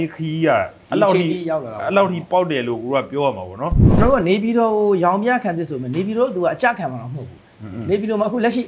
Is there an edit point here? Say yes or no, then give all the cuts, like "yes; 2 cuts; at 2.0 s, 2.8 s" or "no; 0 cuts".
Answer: yes; 1 cut; at 4.0 s